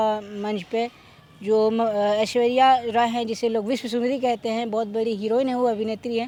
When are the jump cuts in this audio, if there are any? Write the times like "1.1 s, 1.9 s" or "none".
none